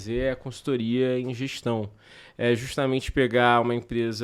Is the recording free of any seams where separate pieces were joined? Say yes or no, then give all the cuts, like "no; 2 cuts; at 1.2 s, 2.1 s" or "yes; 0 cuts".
yes; 0 cuts